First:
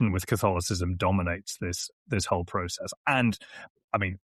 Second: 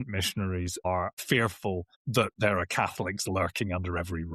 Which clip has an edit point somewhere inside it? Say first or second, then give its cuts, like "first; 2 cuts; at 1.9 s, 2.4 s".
second; 2 cuts; at 0.9 s, 2.0 s